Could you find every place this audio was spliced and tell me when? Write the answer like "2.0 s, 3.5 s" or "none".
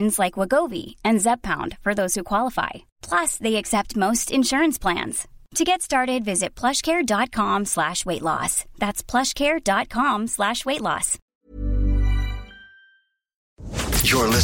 11.3 s, 13.5 s